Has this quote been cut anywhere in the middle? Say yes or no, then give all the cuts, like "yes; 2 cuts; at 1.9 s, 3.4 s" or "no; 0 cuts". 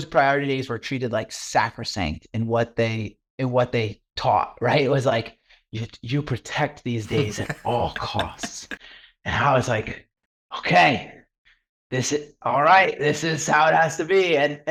no; 0 cuts